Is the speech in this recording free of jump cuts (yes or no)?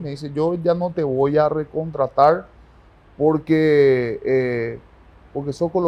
yes